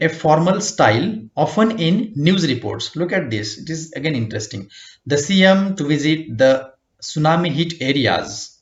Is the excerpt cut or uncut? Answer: uncut